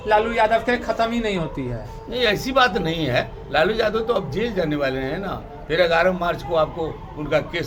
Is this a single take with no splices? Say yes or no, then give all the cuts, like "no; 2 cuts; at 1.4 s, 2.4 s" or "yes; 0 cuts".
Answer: yes; 0 cuts